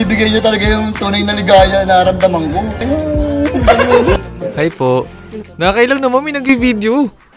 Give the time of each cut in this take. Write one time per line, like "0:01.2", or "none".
0:04.2